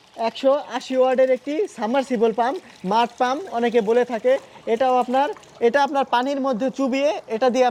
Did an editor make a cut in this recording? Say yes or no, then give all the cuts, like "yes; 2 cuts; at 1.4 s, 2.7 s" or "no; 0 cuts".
no; 0 cuts